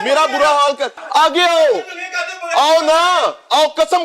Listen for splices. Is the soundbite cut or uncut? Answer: cut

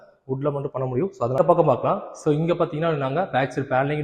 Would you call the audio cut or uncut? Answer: cut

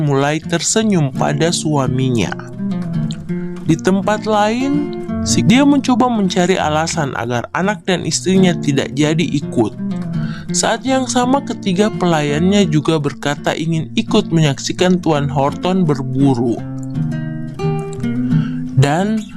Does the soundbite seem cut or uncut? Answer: cut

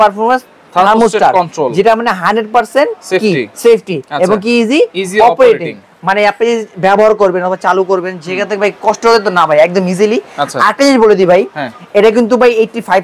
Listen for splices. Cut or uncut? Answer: uncut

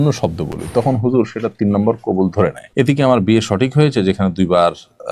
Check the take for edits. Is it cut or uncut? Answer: cut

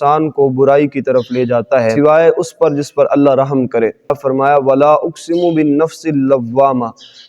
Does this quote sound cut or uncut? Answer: cut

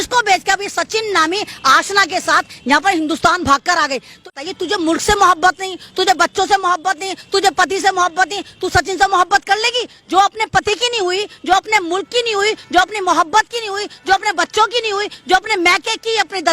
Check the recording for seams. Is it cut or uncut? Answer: cut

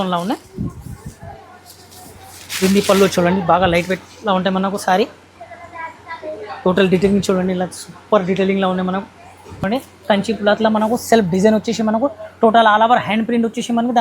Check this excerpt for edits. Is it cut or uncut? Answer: cut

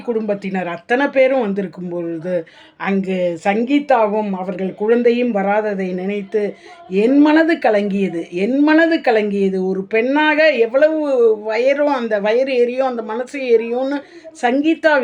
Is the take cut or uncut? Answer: uncut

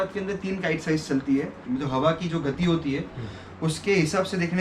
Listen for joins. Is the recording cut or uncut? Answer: cut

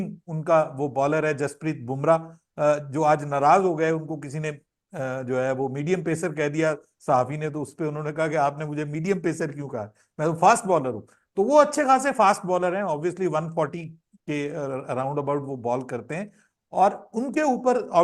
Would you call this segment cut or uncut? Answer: uncut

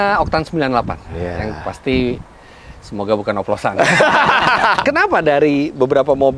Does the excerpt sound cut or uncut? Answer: cut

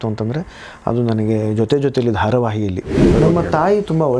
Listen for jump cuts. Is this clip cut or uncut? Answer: cut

